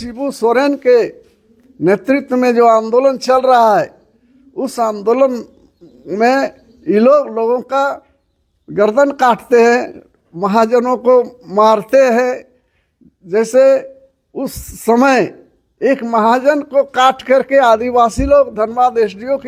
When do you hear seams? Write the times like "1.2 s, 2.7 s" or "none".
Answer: none